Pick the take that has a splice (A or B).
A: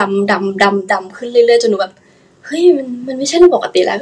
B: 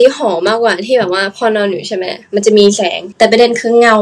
B